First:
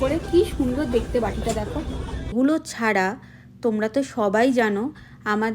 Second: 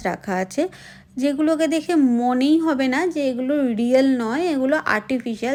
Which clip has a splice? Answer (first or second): first